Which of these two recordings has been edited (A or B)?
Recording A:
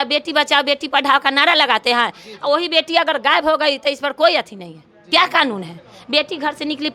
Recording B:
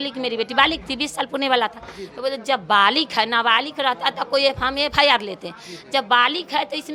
A